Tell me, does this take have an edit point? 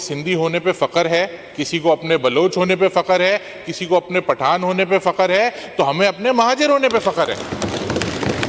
no; 0 cuts

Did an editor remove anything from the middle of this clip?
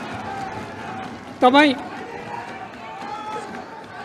no; 0 cuts

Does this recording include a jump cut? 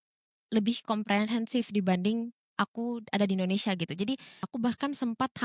yes; 1 cut; at 4.5 s

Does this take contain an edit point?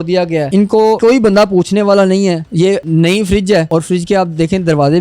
yes; 3 cuts; at 0.8 s, 2.8 s, 3.7 s

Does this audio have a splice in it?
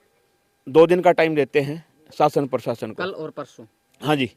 no; 0 cuts

